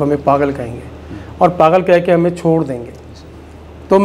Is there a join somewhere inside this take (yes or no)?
no